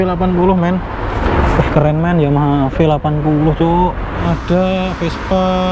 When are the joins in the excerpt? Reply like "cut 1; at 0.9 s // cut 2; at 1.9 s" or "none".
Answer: cut 1; at 1.2 s // cut 2; at 4.2 s